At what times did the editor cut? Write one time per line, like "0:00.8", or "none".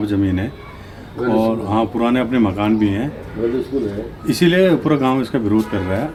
none